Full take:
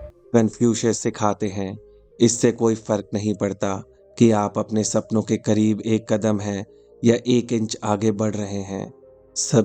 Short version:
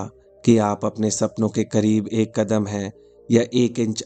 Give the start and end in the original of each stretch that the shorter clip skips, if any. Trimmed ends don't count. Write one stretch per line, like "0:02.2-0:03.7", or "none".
none